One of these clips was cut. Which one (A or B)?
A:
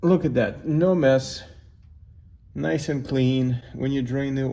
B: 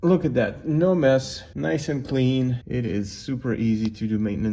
B